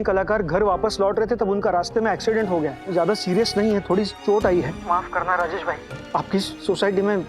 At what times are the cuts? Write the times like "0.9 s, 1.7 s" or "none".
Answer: 2.8 s, 4.8 s